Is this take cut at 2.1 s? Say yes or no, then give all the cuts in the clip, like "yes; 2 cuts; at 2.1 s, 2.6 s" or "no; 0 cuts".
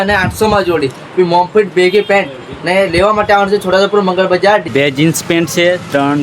no; 1 cut; at 4.7 s